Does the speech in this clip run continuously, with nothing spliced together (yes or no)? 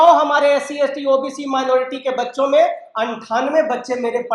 yes